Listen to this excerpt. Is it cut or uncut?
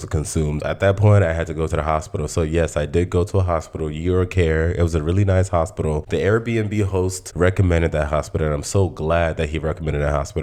uncut